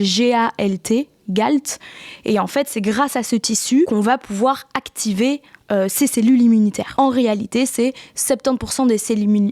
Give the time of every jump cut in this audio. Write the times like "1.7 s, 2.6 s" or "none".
3.9 s, 6.8 s